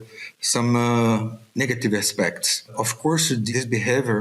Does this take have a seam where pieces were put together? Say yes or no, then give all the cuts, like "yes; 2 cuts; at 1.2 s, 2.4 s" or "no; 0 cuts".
yes; 1 cut; at 3.1 s